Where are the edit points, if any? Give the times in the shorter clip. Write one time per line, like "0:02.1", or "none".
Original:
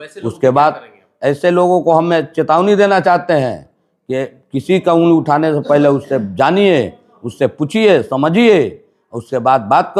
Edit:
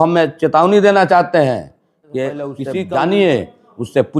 0:02.6